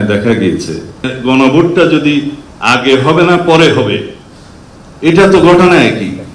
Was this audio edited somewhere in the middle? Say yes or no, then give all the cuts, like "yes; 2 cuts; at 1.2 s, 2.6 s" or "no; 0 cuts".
yes; 1 cut; at 1.1 s